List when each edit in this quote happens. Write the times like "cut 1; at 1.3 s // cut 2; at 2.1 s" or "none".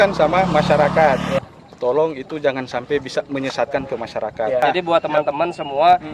cut 1; at 1.4 s // cut 2; at 4.6 s

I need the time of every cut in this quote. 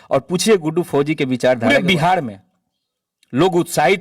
cut 1; at 1.7 s

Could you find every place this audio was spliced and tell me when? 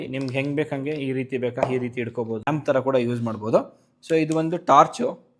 cut 1; at 2.5 s

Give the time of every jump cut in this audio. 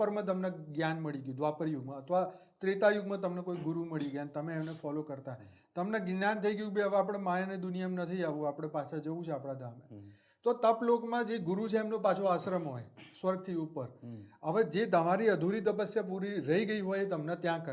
none

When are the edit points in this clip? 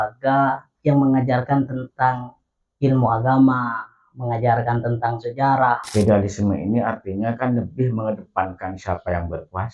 cut 1; at 5.9 s

